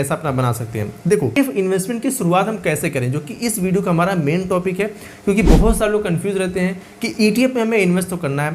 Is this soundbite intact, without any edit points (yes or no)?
no